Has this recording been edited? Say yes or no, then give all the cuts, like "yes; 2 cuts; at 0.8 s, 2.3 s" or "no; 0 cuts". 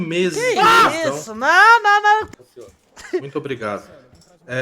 yes; 1 cut; at 2.3 s